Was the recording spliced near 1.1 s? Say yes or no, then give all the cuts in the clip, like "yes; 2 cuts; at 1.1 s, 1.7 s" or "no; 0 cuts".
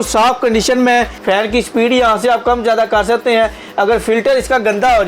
yes; 1 cut; at 1.1 s